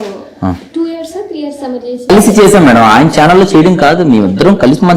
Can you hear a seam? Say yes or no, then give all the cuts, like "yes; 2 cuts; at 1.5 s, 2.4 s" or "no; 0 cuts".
yes; 1 cut; at 2.1 s